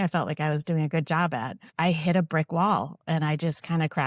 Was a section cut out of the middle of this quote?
yes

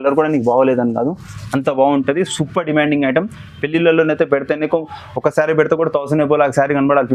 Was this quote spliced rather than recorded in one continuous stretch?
no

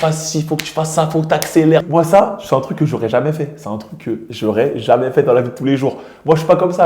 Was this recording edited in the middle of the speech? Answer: yes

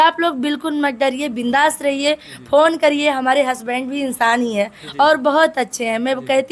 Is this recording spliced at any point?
no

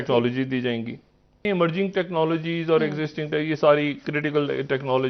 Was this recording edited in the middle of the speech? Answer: yes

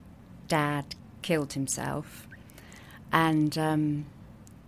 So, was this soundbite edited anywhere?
no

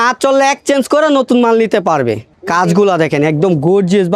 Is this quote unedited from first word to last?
yes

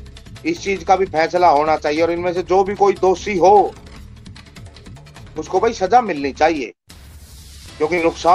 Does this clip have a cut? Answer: yes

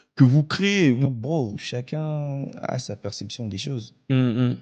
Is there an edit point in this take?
yes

